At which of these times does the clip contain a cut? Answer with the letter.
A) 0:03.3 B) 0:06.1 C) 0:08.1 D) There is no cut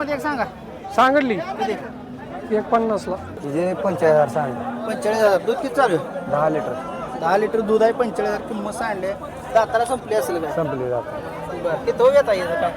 A